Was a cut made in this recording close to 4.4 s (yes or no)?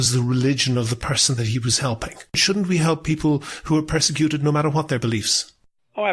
no